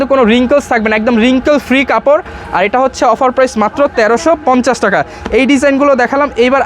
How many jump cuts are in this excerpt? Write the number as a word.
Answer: zero